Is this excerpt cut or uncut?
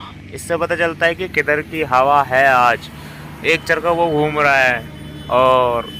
uncut